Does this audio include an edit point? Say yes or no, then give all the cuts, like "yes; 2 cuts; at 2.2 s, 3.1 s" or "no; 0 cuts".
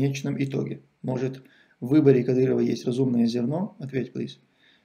no; 0 cuts